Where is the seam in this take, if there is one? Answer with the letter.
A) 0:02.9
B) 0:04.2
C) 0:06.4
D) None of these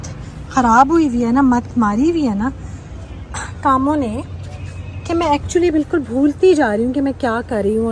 D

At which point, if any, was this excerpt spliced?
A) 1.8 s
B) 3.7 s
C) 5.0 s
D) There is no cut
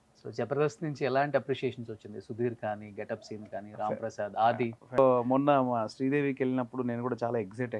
C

